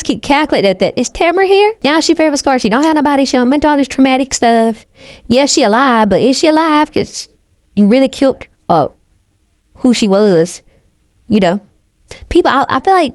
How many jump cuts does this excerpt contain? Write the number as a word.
one